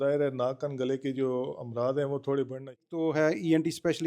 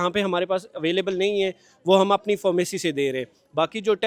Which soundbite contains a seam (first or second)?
first